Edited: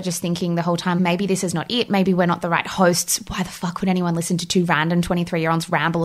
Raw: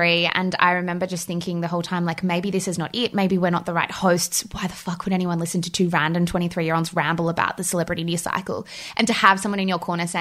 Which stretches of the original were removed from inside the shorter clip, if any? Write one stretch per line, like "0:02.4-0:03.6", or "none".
0:02.0-0:02.2